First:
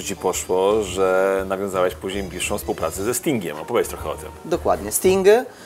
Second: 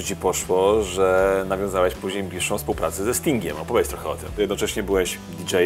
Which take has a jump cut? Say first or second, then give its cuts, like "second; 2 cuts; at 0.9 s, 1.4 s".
second; 1 cut; at 4.3 s